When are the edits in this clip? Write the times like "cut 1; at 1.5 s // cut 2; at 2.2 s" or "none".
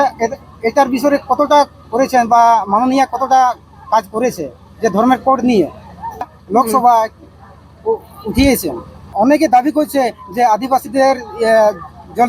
cut 1; at 6.3 s // cut 2; at 9.1 s